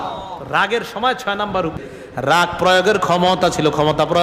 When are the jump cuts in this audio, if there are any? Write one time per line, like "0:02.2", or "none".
0:01.9